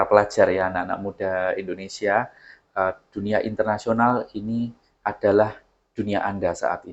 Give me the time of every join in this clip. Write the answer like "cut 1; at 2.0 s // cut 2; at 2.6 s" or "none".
none